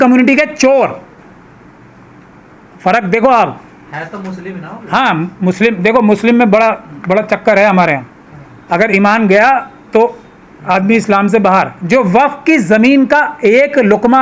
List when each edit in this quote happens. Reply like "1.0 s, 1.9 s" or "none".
none